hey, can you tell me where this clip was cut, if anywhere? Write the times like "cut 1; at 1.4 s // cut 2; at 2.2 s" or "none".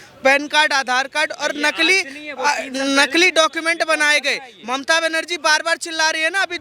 none